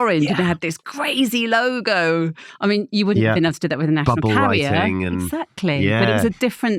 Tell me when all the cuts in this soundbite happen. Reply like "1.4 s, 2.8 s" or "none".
none